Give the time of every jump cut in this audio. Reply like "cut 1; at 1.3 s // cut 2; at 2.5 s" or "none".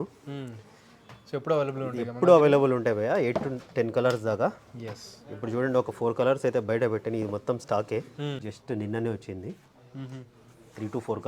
cut 1; at 8.4 s